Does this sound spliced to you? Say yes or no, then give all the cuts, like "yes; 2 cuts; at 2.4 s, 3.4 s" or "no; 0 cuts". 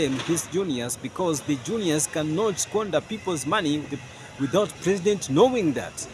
no; 0 cuts